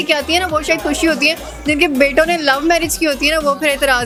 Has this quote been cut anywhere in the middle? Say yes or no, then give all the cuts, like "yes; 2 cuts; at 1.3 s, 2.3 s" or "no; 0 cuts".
no; 0 cuts